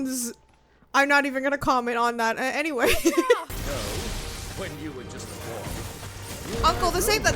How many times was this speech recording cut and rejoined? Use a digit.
1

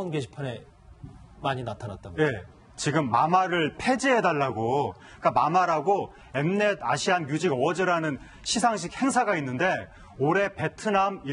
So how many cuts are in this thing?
1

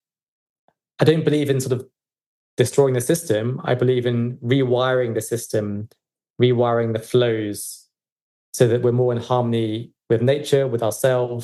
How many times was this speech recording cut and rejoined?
0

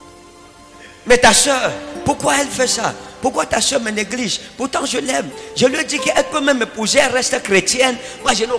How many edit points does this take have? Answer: 0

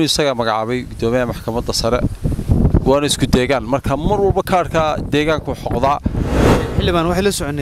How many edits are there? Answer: 1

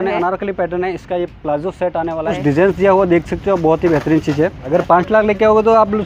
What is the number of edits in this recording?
2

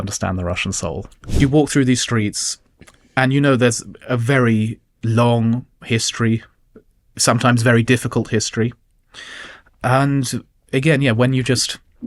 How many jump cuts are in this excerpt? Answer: 1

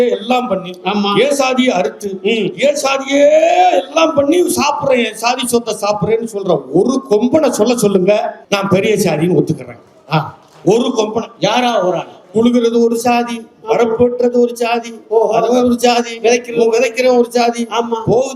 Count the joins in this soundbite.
1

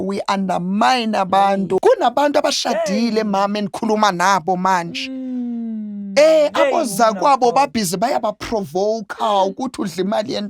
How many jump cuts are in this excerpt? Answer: 1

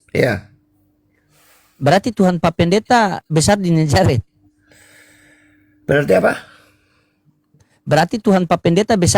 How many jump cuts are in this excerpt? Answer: 0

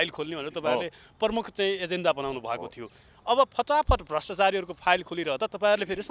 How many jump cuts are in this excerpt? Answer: 0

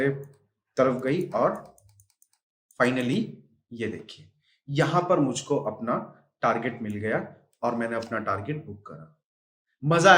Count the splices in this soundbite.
0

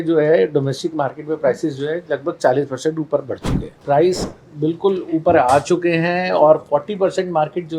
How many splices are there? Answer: 1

